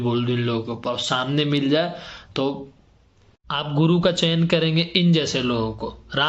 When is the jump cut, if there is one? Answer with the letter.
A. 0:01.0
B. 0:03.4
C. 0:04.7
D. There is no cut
B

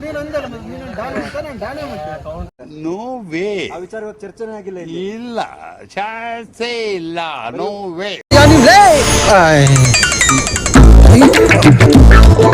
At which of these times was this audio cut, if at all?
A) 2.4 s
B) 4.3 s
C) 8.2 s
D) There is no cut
C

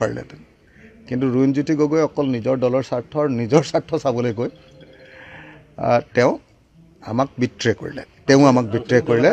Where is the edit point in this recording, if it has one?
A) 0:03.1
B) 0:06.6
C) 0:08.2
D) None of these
D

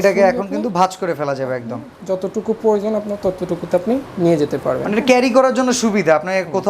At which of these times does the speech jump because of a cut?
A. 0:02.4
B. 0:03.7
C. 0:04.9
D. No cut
D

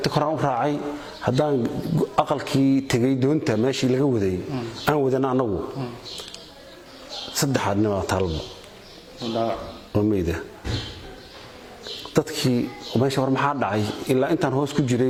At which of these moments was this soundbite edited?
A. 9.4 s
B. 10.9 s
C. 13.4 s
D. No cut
D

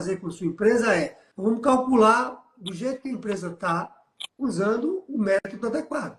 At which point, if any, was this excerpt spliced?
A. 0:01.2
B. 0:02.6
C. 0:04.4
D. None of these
A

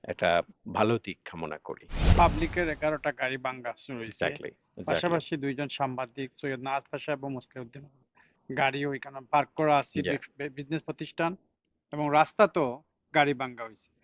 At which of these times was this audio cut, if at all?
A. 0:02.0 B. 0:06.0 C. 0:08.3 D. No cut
A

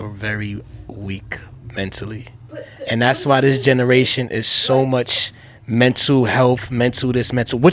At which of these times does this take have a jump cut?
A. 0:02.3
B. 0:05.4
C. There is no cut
C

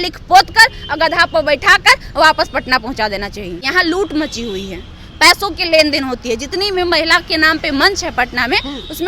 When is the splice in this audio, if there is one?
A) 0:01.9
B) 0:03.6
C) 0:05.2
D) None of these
B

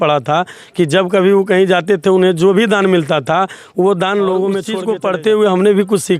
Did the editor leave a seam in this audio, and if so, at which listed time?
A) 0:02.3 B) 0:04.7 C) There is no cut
B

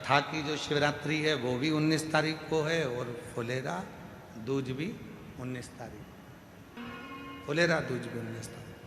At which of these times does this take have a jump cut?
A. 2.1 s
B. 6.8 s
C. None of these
B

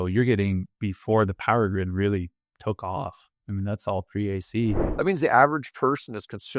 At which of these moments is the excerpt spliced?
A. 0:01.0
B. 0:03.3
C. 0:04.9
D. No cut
C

